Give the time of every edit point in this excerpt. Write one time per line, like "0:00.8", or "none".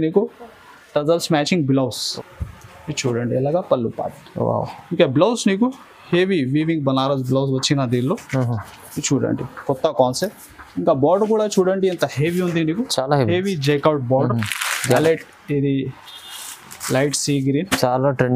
0:02.0
0:15.0